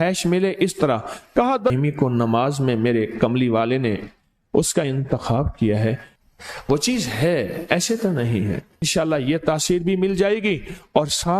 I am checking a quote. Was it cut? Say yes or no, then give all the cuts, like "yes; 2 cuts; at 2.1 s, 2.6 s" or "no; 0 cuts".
yes; 3 cuts; at 1.7 s, 6.1 s, 8.9 s